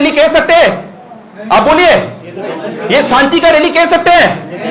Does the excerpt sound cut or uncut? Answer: uncut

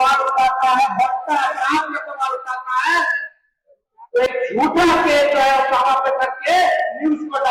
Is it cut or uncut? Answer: uncut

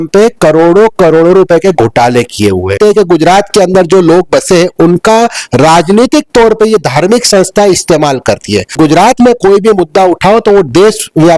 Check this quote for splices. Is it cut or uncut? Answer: cut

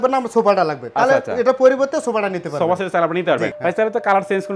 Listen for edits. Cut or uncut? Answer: cut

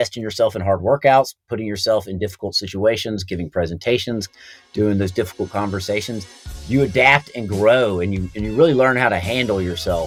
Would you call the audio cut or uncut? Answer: uncut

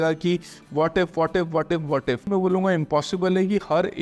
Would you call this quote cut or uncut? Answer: cut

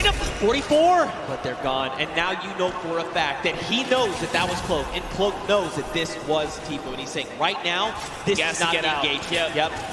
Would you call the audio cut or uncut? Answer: uncut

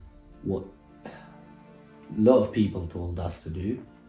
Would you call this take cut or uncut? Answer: uncut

